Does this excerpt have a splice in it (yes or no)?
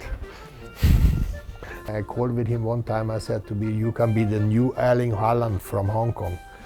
yes